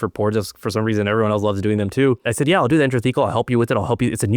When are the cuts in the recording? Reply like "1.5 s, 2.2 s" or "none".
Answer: 2.3 s